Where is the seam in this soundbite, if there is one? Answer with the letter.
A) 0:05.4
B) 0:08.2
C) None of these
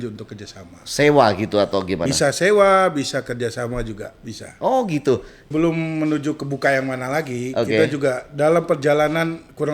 A